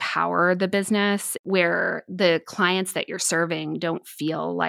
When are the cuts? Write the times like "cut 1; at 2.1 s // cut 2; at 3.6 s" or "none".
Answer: cut 1; at 1.4 s